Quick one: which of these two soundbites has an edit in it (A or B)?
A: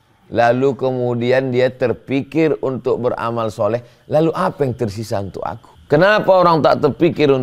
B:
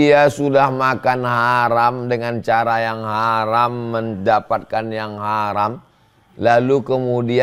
A